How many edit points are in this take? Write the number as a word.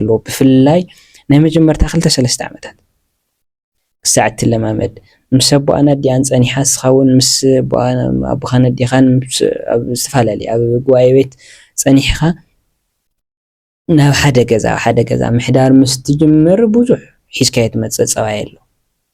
zero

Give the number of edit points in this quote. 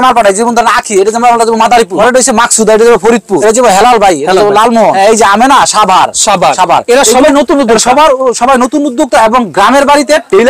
three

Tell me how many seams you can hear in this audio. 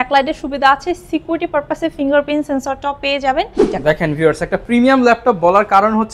one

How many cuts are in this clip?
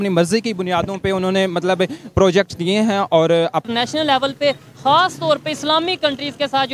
one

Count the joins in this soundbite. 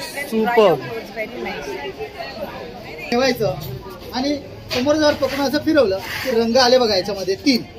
one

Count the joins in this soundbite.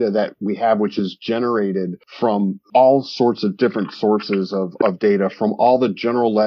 one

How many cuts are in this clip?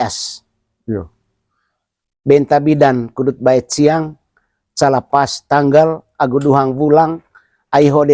zero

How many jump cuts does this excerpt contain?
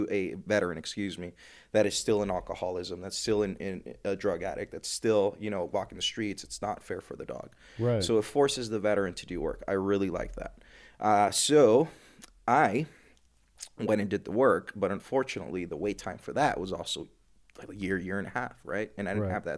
zero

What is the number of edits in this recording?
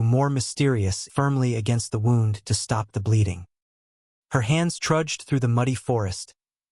two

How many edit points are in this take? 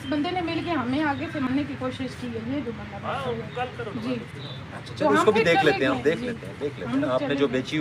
zero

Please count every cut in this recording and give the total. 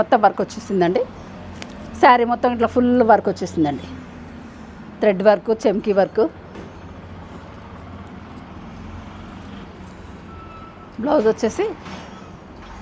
zero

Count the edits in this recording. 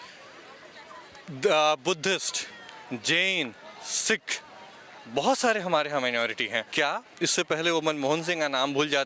one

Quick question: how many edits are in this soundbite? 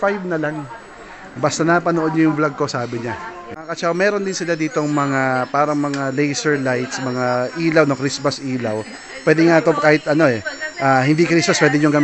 one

